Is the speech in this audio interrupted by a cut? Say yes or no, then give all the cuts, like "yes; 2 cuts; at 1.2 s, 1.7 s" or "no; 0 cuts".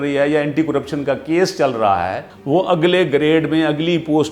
yes; 1 cut; at 2.3 s